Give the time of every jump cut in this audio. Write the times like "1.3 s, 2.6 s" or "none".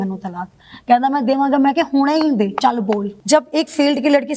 3.1 s